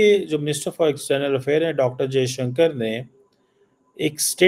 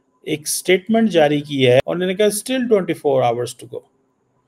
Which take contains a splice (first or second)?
second